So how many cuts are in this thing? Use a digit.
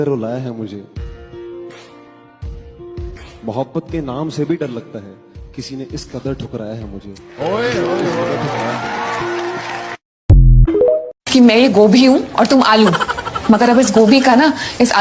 1